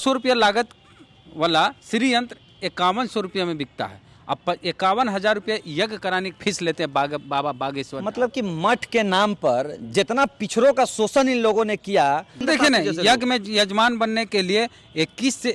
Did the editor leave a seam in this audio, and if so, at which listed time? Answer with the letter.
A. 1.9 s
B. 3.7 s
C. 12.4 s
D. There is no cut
C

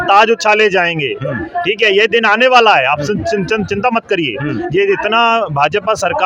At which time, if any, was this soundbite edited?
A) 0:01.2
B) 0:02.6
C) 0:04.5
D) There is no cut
D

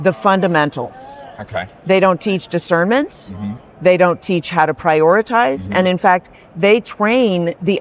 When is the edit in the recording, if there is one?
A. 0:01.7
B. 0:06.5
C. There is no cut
C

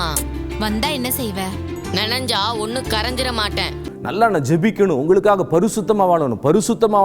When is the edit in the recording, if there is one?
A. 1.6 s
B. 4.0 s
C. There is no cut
B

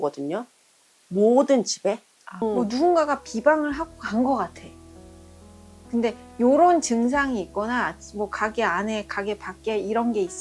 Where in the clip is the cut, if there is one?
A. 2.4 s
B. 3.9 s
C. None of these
A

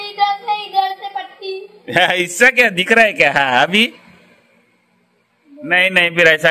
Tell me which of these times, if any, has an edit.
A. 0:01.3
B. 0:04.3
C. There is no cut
C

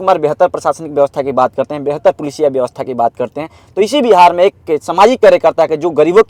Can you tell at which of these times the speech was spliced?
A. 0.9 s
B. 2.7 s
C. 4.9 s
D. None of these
D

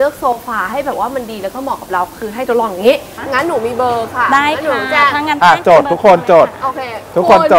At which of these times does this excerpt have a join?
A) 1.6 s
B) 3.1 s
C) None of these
B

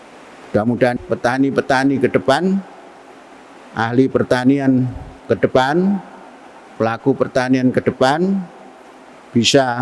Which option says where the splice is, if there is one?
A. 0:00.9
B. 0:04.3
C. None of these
A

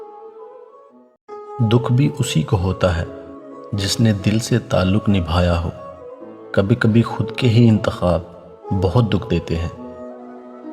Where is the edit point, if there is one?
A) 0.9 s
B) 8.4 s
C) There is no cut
A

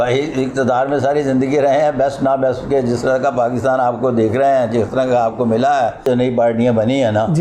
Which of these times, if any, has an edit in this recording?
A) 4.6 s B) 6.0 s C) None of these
B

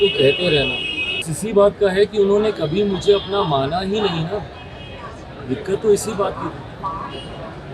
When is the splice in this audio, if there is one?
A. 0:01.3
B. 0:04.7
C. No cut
A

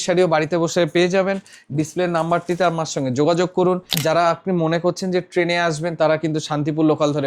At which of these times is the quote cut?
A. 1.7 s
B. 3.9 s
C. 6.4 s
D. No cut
B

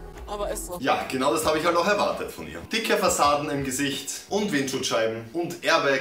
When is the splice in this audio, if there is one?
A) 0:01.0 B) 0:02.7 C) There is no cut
B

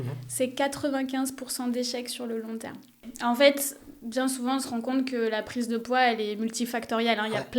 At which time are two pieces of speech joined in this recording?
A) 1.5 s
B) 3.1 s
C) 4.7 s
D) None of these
B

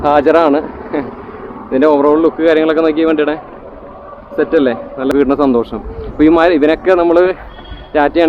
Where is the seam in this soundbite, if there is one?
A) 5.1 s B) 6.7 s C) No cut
A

